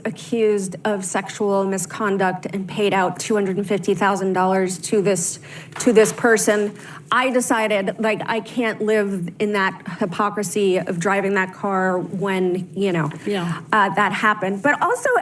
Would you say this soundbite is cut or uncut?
cut